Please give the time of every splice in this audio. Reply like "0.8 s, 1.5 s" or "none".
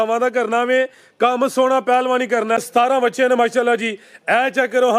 2.6 s